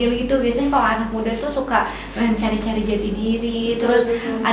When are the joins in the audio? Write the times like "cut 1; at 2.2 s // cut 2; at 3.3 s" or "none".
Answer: none